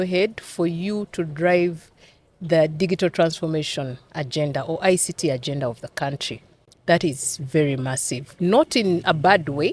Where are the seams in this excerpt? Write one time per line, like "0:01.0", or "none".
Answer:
none